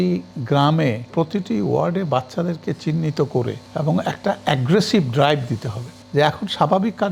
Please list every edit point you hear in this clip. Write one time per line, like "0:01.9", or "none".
0:01.1
0:03.6
0:06.0